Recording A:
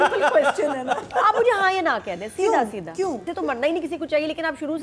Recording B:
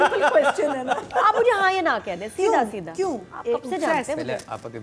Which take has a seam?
A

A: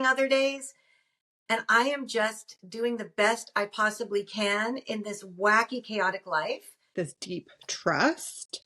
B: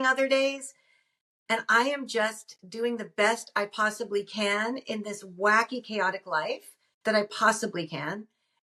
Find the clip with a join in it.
A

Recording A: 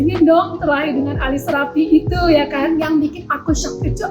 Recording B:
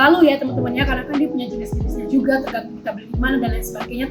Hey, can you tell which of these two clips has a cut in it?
A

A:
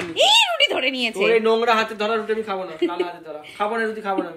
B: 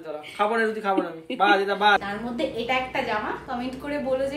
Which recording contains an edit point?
B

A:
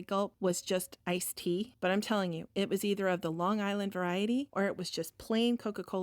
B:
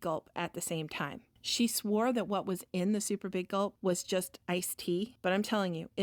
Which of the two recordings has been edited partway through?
A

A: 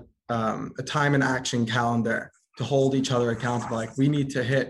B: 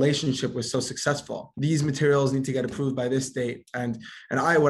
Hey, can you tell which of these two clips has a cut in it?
B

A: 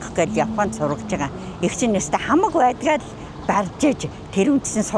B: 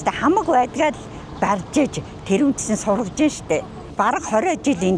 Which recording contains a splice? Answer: B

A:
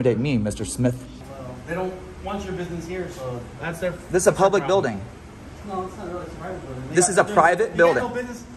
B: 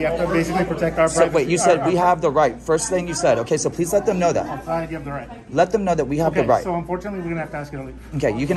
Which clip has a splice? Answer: A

